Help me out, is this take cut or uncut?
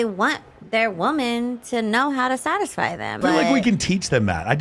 cut